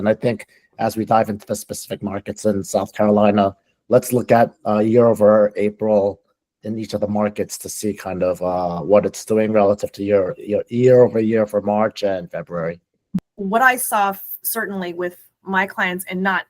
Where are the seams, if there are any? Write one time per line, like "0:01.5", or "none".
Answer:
0:13.3